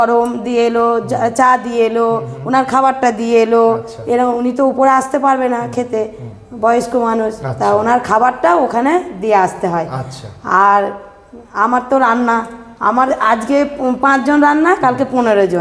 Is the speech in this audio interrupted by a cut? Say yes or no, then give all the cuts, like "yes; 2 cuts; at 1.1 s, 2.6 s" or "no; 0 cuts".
no; 0 cuts